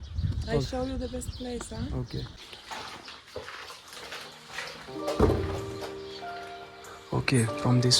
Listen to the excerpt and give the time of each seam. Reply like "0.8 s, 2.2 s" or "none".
2.4 s